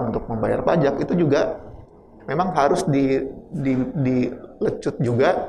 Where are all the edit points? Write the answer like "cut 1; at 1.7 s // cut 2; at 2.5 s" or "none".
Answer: none